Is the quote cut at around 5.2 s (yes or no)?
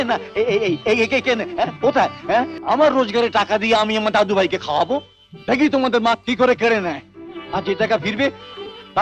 no